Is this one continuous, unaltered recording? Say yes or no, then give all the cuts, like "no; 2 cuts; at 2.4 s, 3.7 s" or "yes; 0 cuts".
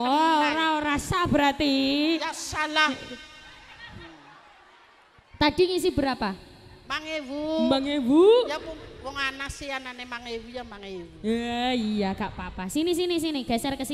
yes; 0 cuts